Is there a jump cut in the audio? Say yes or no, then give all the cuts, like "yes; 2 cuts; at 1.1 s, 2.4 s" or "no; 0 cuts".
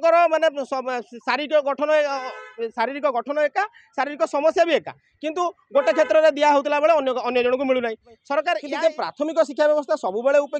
yes; 1 cut; at 8.7 s